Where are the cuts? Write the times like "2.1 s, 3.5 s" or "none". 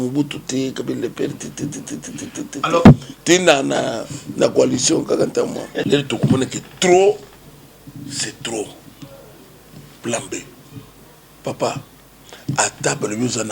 5.8 s